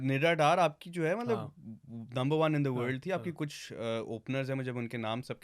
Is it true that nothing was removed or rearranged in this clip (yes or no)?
yes